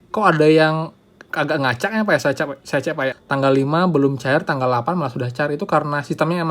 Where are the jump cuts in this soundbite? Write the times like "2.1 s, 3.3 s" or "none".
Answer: 3.1 s